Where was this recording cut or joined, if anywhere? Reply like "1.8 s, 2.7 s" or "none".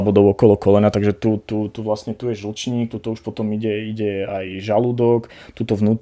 none